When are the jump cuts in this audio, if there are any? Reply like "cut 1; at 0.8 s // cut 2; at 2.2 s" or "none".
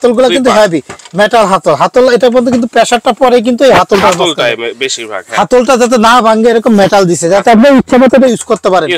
none